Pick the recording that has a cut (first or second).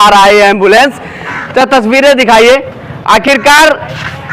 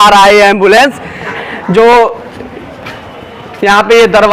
second